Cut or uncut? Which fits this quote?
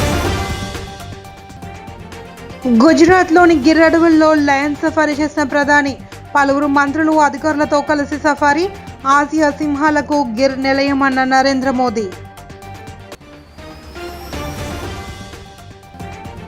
cut